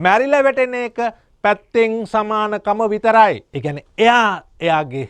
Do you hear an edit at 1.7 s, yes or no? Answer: no